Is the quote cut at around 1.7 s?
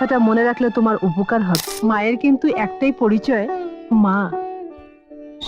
yes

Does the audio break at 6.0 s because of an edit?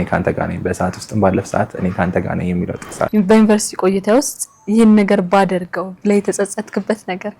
no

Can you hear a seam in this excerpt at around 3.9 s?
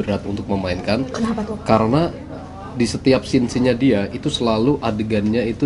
no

